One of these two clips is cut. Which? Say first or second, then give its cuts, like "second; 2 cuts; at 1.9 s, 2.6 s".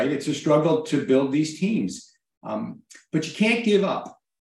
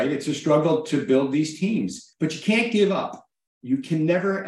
second; 1 cut; at 2.0 s